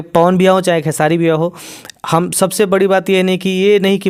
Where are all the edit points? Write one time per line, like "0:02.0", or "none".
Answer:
none